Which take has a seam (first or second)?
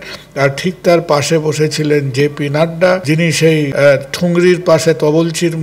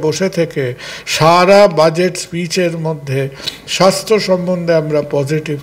first